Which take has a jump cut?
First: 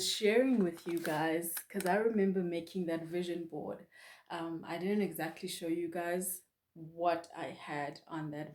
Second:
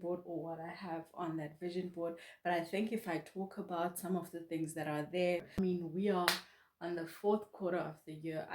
second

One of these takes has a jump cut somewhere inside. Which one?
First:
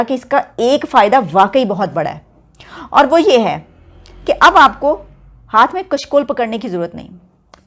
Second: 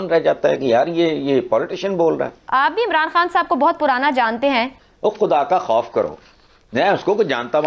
second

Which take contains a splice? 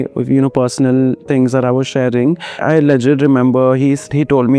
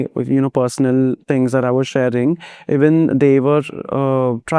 first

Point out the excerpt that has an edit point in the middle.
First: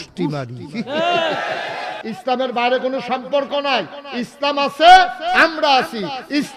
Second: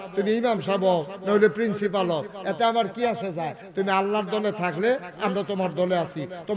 first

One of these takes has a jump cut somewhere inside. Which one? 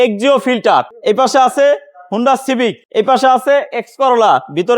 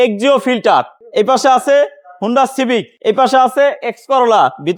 first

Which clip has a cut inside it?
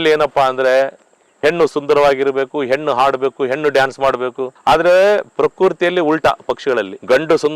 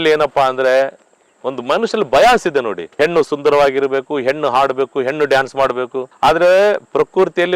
first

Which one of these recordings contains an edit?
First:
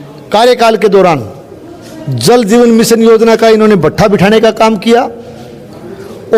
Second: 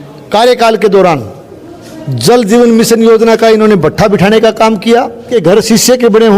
second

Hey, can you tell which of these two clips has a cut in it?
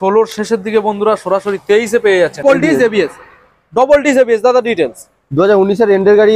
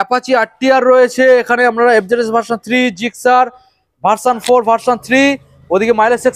first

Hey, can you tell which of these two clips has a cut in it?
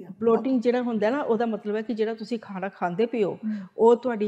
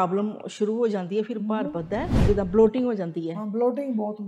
second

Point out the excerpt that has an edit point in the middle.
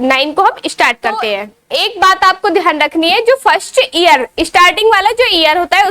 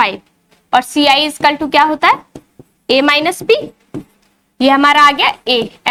first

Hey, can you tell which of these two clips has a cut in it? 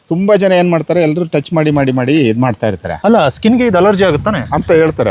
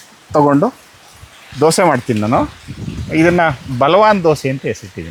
first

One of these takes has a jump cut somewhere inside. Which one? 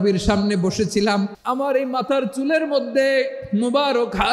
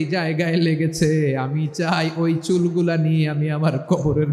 first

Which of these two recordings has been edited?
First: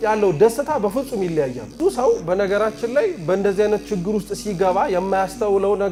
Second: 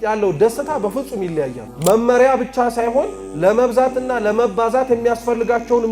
second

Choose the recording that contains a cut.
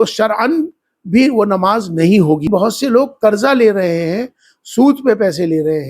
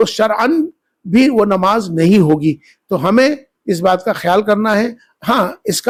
first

